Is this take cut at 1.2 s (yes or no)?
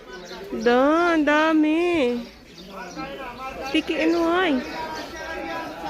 no